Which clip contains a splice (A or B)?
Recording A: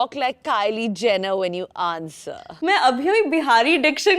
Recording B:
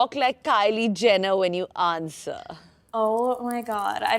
A